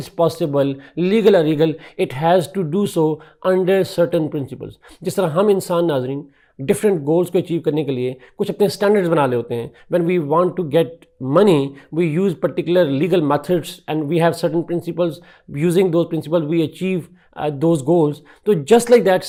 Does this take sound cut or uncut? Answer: uncut